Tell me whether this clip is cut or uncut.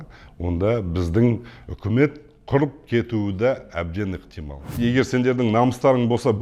cut